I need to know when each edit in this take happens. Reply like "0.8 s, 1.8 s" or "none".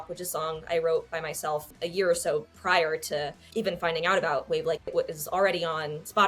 1.7 s, 3.4 s